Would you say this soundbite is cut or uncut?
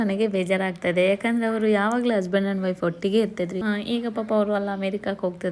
cut